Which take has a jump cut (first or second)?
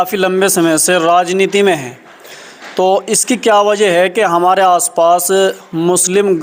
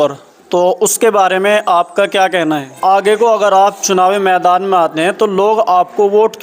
second